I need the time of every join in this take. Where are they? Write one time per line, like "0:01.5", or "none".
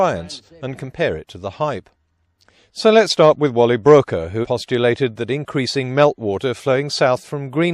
0:01.7